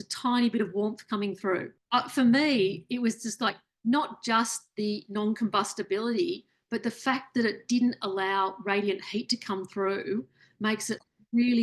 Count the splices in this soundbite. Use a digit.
1